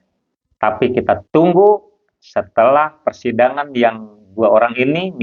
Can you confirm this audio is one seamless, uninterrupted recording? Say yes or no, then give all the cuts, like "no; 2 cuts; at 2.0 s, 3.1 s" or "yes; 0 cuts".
yes; 0 cuts